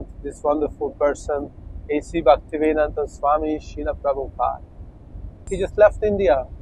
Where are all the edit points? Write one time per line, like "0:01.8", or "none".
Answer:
0:05.4